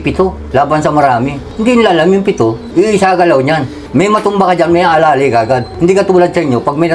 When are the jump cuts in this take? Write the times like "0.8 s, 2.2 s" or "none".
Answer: none